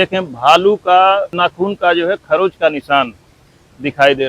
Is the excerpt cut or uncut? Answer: cut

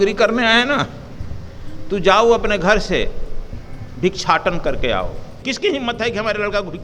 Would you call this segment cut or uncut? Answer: cut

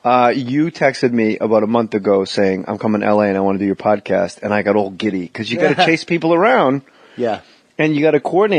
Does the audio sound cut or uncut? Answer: cut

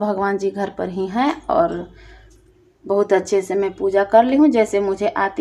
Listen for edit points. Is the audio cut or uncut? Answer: uncut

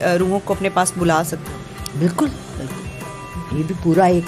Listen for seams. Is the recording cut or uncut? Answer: uncut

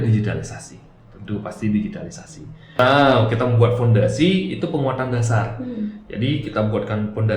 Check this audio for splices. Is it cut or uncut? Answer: cut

